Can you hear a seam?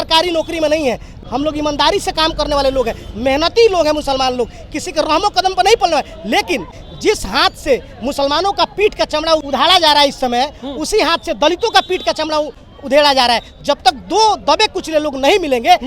yes; 3 cuts; at 1.1 s, 6.8 s, 9.4 s

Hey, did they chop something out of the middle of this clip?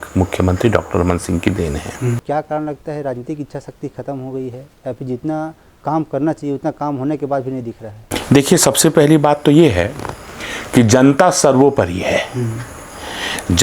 yes; 1 cut; at 2.2 s

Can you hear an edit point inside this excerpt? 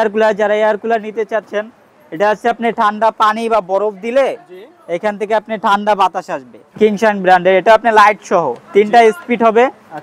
yes; 1 cut; at 6.6 s

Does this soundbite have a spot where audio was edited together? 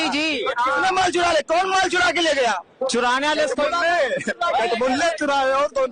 no; 0 cuts

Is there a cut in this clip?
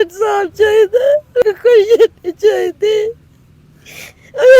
yes; 1 cut; at 1.4 s

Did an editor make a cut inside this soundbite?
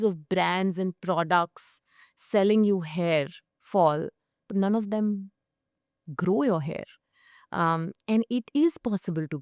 no; 0 cuts

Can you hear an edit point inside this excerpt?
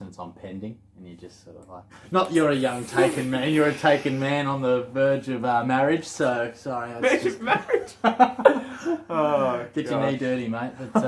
no; 0 cuts

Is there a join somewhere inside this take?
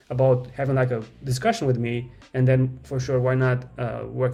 no; 0 cuts

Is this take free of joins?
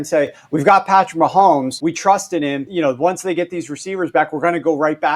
no; 2 cuts; at 1.7 s, 2.7 s

